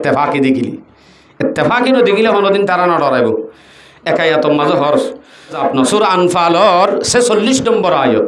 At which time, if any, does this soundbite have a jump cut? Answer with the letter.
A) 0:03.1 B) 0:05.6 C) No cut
B